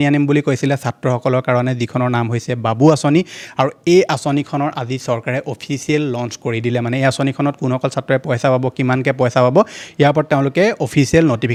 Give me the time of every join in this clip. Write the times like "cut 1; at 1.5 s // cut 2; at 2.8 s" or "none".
none